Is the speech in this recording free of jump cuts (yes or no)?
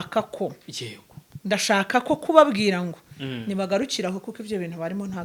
yes